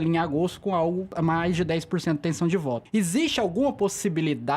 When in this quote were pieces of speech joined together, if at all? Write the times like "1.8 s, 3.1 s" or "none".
1.1 s, 2.8 s

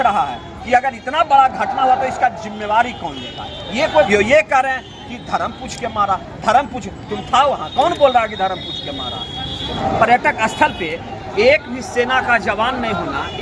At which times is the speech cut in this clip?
4.1 s, 9.7 s

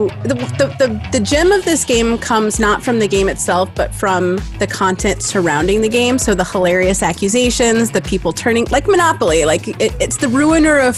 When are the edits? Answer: none

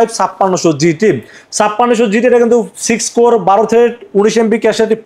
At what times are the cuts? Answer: none

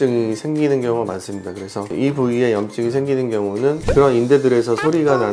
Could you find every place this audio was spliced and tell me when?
3.8 s

